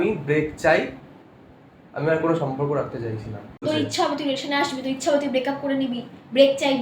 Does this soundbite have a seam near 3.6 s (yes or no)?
yes